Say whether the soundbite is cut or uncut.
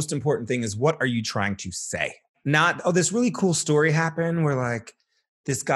cut